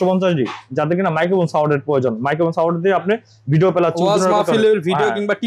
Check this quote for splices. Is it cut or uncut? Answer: uncut